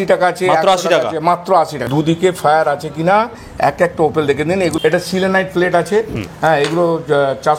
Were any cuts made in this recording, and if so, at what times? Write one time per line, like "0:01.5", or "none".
0:01.8
0:04.7